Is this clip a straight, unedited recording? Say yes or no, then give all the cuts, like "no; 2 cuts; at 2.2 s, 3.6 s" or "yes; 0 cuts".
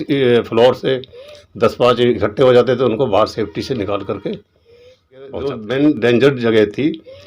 no; 1 cut; at 5.5 s